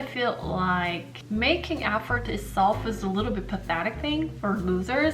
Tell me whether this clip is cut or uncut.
cut